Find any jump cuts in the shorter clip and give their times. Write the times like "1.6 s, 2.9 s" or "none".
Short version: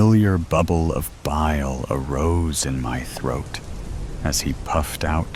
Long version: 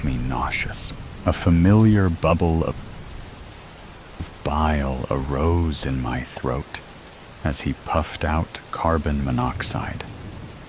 1.1 s

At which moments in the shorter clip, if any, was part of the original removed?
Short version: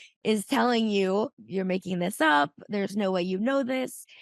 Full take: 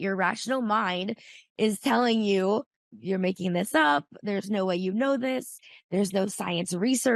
1.4 s

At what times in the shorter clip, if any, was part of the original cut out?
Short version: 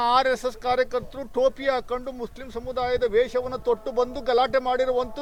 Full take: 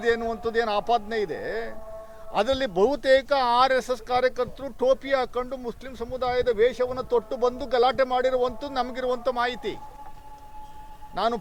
none

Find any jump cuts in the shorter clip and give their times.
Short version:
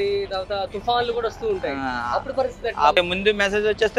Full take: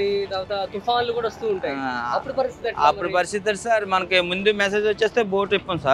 2.9 s

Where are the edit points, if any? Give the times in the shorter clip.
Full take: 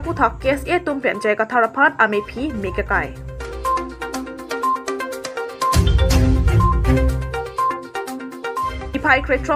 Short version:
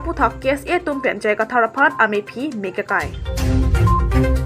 3.3 s

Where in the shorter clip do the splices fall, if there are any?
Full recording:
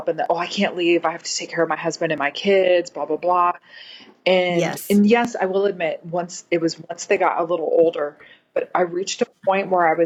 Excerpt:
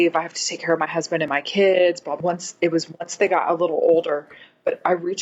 2.1 s

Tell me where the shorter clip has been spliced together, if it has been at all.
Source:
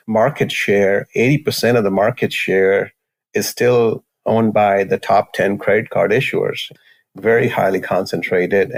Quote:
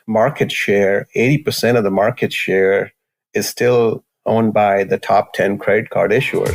none

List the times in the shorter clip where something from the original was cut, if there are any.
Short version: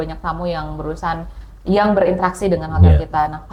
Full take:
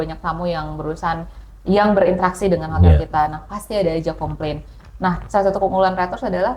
none

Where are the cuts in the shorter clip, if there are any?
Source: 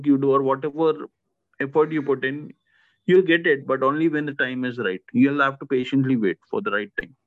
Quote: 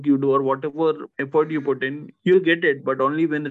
1.1 s, 2.1 s

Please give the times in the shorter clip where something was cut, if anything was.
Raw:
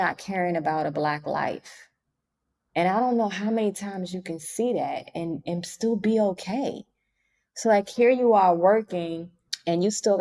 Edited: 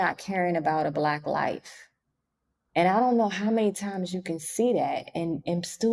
none

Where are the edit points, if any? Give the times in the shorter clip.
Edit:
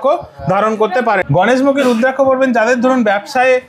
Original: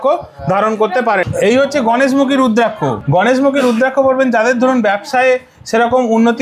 1.3 s

